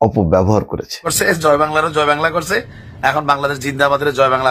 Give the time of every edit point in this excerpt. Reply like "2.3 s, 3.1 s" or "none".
1.1 s